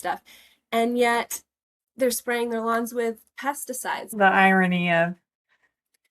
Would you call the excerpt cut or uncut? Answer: cut